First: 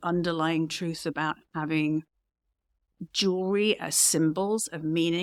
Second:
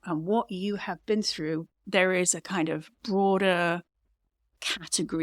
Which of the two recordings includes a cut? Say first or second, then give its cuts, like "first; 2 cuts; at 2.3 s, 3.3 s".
second; 1 cut; at 1.8 s